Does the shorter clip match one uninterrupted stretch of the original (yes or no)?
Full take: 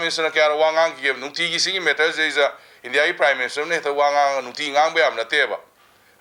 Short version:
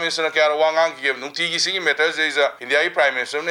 no